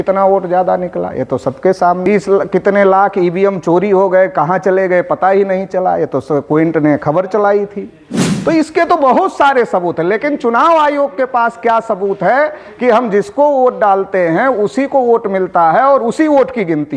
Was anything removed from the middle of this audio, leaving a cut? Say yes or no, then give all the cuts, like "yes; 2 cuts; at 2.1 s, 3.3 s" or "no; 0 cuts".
yes; 1 cut; at 2.1 s